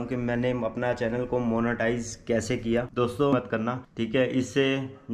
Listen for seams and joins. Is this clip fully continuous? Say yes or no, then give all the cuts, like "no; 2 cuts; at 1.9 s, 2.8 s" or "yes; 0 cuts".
no; 1 cut; at 3.3 s